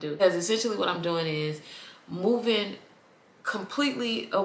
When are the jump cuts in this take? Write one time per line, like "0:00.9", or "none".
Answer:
none